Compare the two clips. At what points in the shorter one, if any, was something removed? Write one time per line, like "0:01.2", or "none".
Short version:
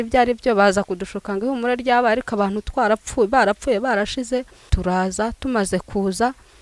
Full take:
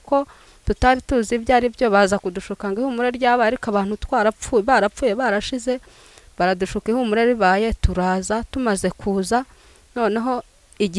0:04.7